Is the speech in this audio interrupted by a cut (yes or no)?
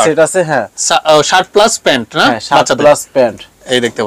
no